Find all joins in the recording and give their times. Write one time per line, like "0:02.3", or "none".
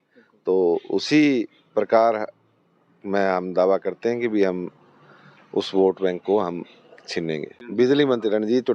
0:07.6